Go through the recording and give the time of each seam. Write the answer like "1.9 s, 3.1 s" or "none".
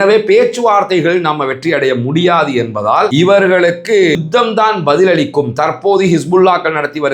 3.1 s